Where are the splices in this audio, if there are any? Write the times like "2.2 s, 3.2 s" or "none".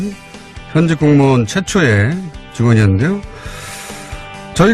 none